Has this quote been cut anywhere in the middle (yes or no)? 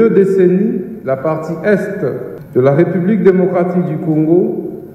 yes